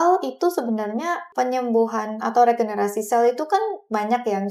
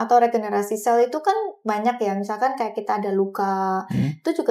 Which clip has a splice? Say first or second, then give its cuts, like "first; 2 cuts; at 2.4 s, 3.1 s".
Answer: first; 1 cut; at 1.2 s